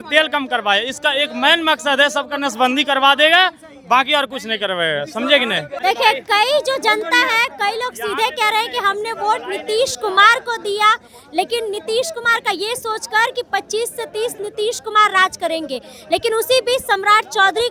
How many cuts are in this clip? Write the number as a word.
zero